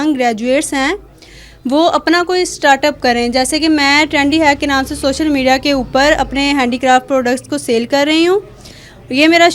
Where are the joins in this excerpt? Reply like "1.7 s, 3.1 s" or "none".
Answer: none